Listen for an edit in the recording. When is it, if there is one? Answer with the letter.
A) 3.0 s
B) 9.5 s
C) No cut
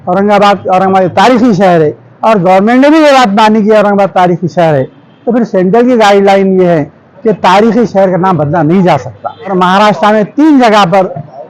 B